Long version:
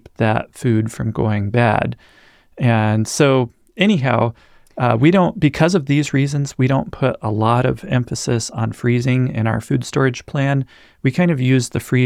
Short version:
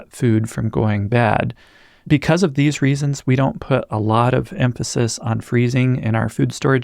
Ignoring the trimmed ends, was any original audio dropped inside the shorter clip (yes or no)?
yes